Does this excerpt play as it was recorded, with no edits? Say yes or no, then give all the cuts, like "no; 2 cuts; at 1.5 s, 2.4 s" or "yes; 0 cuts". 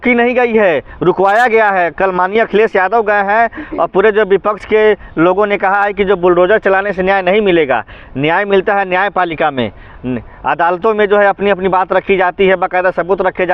yes; 0 cuts